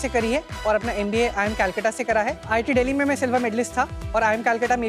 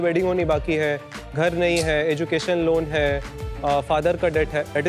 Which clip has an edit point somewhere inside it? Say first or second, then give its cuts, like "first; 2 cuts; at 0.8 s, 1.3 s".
first; 2 cuts; at 2.5 s, 4.0 s